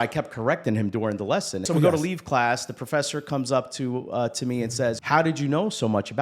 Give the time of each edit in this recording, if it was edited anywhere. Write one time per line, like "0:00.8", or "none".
0:01.7
0:05.0